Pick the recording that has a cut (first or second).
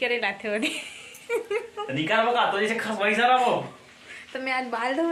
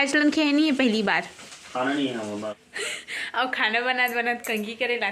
second